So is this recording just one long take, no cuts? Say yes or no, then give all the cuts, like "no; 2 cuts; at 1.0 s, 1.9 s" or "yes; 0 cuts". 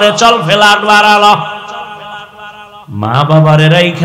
no; 1 cut; at 2.7 s